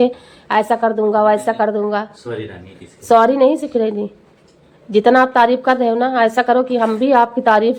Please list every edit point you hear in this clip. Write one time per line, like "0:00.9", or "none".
none